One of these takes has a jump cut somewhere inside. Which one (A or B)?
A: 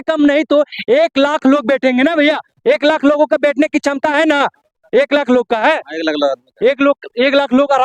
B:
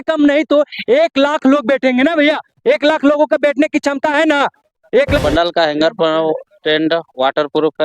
B